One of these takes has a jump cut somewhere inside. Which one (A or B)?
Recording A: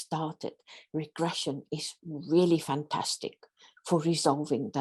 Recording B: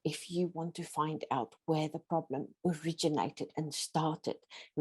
B